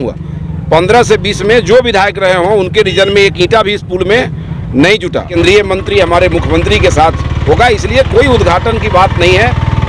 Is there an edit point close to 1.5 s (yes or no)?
no